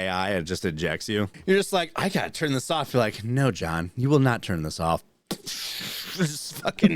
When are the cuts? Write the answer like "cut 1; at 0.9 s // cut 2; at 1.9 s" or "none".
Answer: cut 1; at 1.3 s

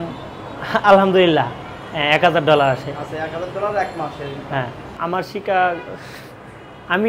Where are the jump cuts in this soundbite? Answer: cut 1; at 4.8 s

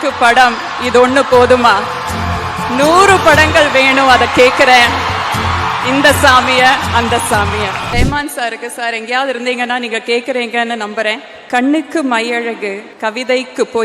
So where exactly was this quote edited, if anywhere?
cut 1; at 7.9 s // cut 2; at 11.3 s // cut 3; at 12.9 s

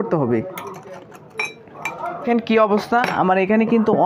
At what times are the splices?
cut 1; at 2.2 s

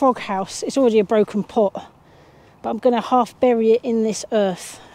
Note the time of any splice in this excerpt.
none

